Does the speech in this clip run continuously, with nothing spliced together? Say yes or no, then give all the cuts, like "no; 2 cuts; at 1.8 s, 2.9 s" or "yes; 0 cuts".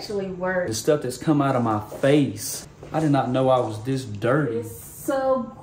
no; 1 cut; at 4.7 s